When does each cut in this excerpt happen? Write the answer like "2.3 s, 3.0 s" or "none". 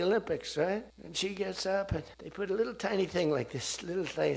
1.0 s, 2.2 s